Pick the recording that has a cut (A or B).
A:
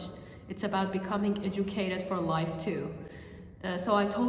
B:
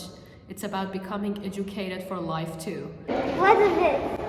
B